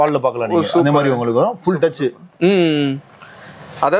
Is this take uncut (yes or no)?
yes